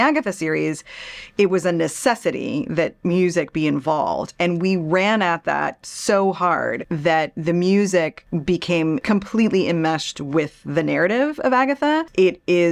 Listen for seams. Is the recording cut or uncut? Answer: uncut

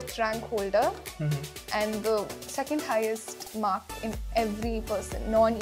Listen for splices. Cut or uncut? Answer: uncut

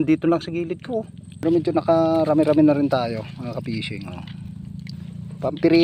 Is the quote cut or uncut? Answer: cut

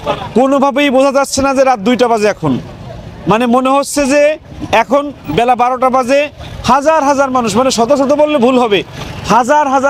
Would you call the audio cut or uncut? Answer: uncut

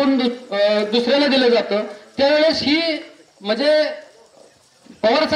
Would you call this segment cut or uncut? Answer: uncut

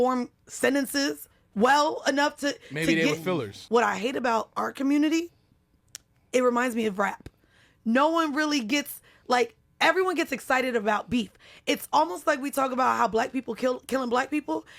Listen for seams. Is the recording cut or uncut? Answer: cut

